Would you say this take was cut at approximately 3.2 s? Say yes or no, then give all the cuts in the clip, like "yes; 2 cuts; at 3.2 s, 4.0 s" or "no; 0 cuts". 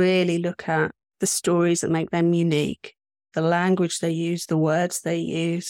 yes; 1 cut; at 3.2 s